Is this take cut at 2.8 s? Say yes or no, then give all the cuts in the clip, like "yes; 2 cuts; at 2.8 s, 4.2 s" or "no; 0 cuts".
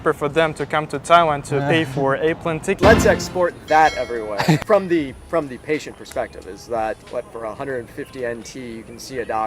yes; 2 cuts; at 2.8 s, 4.6 s